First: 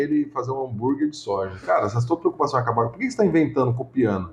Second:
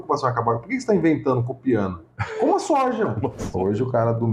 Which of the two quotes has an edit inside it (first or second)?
second